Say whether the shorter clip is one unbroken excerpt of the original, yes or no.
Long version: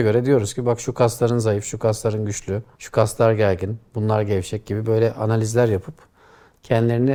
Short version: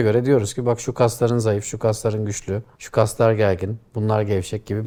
yes